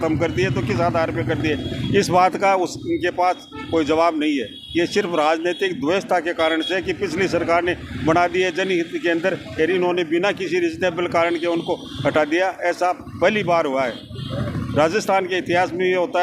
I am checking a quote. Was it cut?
no; 0 cuts

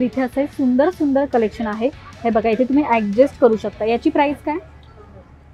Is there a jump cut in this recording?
no; 0 cuts

